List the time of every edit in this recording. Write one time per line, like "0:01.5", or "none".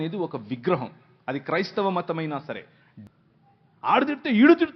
0:02.9

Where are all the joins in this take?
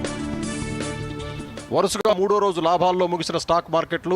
0:01.6

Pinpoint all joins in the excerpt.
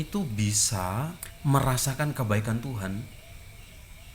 0:01.3

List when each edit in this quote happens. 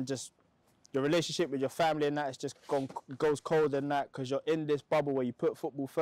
none

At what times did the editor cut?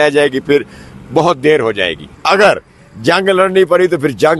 0:02.1

